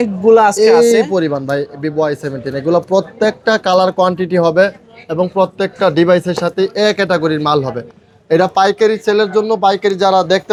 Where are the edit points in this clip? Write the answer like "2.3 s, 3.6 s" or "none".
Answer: none